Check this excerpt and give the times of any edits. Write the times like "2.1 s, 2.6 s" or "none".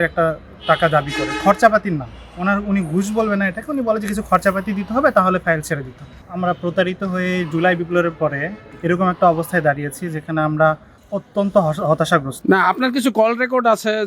6.2 s, 12.3 s